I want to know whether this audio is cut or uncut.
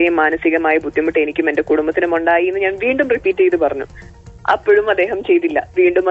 uncut